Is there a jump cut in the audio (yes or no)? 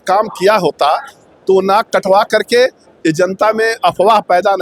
no